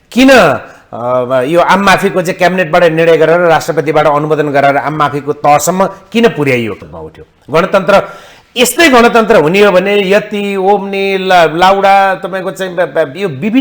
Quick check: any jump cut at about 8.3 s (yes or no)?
no